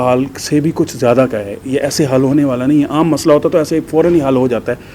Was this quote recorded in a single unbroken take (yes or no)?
yes